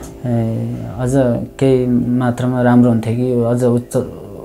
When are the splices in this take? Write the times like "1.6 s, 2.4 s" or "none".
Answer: none